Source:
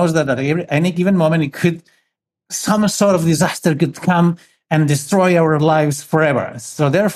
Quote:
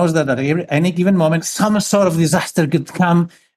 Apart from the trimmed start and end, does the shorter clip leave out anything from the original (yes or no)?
yes